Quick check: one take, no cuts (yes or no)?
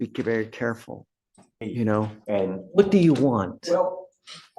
no